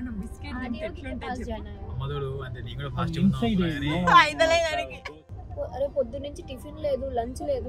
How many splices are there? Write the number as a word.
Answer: one